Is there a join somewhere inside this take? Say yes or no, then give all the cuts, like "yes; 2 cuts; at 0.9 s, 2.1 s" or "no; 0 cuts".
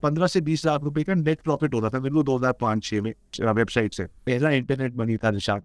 yes; 2 cuts; at 3.3 s, 4.2 s